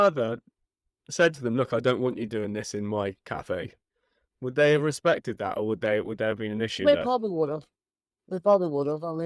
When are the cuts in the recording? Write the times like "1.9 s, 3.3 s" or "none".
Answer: none